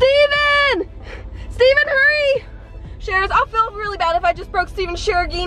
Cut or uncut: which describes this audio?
uncut